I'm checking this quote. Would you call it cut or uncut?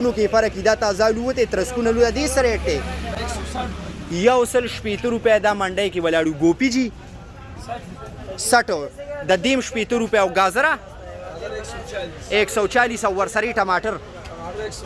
uncut